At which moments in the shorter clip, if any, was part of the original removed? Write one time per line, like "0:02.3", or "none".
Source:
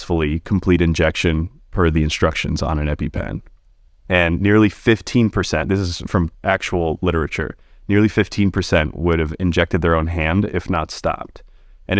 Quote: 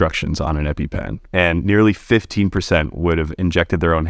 0:01.2
0:02.3